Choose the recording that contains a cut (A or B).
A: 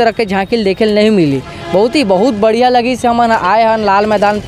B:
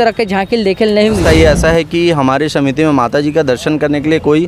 B